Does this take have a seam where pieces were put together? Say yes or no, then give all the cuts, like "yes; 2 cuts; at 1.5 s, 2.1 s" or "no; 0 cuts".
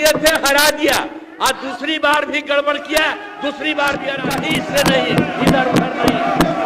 yes; 1 cut; at 4.3 s